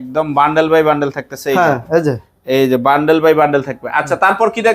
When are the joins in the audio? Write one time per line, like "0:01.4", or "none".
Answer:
none